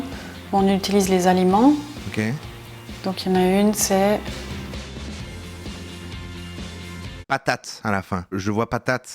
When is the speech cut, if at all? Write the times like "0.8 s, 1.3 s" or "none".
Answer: 7.2 s